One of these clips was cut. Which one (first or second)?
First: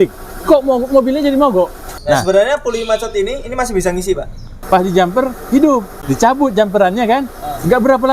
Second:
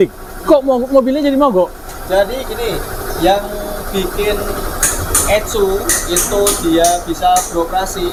first